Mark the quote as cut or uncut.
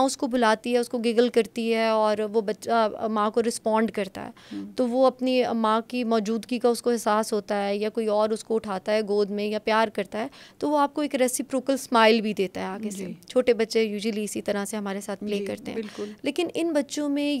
uncut